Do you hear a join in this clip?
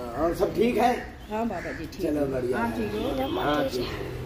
no; 0 cuts

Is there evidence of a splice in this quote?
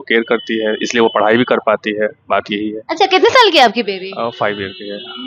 no; 0 cuts

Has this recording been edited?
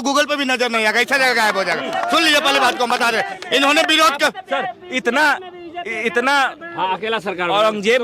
no; 0 cuts

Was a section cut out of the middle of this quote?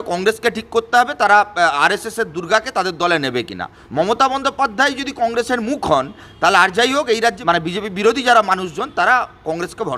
yes; 2 cuts; at 3.8 s, 7.4 s

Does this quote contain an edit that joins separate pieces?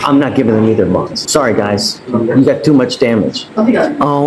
yes; 2 cuts; at 1.2 s, 3.4 s

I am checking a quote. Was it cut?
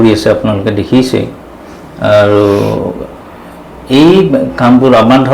no; 0 cuts

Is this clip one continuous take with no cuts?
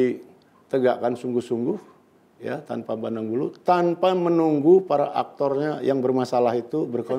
yes; 0 cuts

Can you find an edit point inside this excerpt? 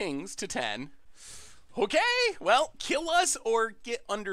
no; 0 cuts

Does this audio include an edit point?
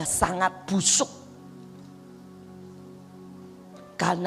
no; 0 cuts

